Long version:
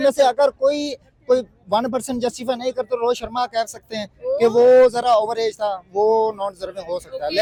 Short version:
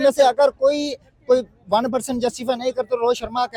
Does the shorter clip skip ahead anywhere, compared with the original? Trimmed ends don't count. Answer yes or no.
no